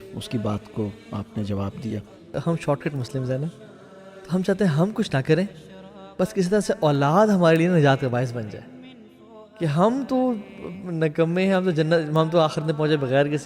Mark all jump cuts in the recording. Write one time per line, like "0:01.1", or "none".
0:02.3